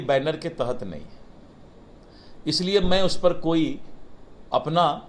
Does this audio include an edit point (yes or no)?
no